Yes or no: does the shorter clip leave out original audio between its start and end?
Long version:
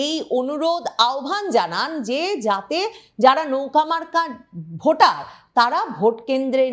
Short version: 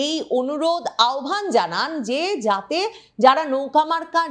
no